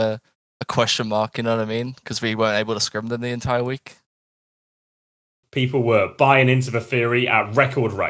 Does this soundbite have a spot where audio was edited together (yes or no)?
yes